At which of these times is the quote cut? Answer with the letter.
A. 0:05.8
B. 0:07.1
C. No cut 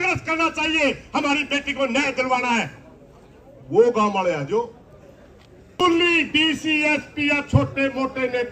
A